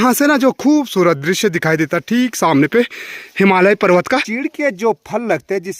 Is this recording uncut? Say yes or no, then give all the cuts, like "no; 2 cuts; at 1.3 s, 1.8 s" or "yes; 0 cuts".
no; 1 cut; at 4.3 s